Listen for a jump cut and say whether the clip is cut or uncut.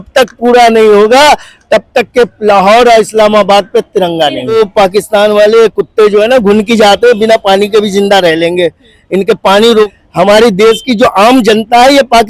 cut